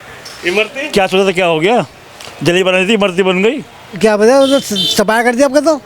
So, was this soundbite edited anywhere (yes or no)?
yes